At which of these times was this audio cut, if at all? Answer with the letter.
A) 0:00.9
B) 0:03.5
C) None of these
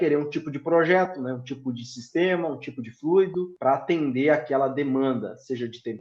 B